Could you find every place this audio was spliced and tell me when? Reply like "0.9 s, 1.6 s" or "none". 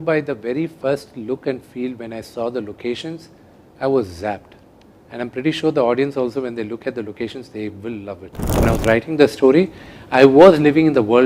8.6 s

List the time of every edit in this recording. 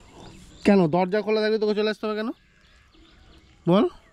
none

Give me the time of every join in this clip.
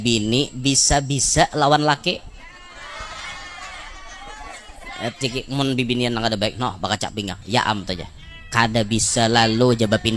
5.4 s

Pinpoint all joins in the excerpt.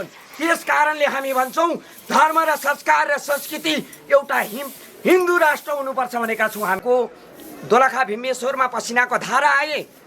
6.8 s

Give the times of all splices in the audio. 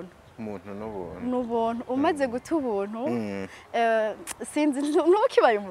none

